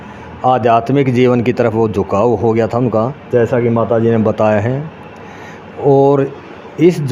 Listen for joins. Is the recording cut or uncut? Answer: uncut